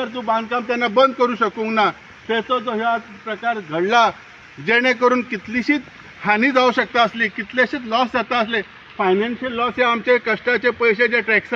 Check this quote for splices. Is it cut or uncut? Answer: uncut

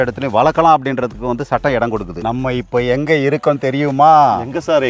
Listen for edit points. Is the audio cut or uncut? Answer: cut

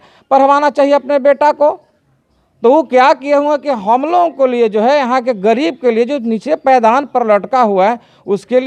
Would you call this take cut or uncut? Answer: uncut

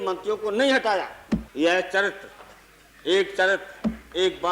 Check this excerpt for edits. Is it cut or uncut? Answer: cut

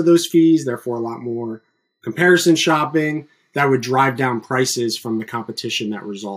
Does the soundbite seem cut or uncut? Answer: uncut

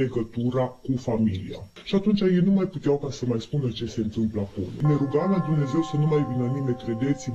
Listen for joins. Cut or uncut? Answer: cut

